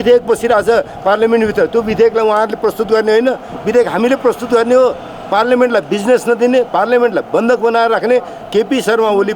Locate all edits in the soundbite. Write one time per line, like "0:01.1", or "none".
0:08.4